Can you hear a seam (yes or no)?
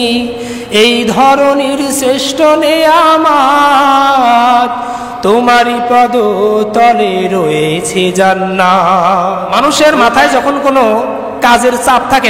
yes